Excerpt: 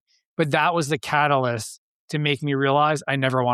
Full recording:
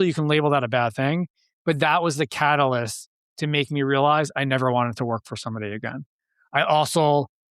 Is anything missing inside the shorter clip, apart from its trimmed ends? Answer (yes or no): no